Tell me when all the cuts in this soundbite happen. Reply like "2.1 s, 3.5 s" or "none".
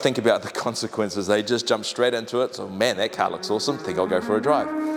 none